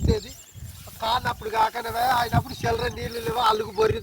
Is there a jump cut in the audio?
yes; 1 cut; at 1.8 s

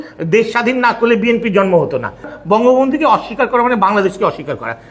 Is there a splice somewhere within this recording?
yes; 1 cut; at 2.4 s

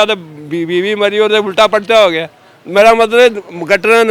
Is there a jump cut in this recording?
no; 0 cuts

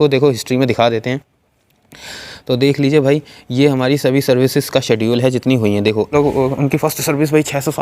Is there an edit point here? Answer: yes; 1 cut; at 6.1 s

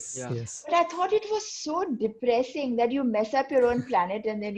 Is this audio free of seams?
yes; 0 cuts

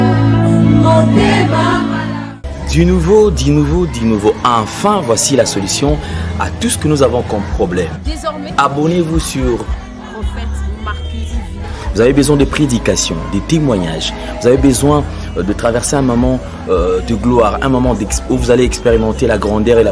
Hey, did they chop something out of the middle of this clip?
no; 0 cuts

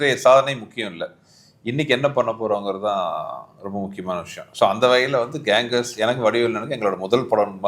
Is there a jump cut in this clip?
no; 0 cuts

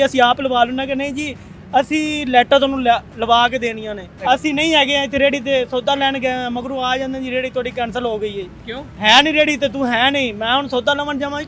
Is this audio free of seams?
yes; 0 cuts

